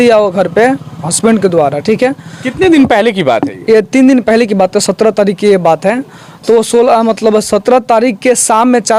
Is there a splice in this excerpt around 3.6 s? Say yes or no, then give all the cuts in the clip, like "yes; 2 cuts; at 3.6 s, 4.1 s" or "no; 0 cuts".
no; 0 cuts